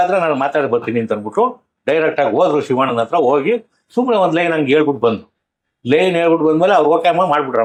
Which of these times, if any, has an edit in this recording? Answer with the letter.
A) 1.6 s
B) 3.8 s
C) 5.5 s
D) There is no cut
D